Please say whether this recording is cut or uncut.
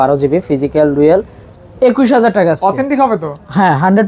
cut